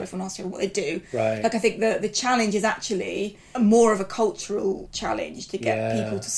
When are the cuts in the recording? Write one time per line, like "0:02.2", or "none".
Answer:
0:03.4
0:04.9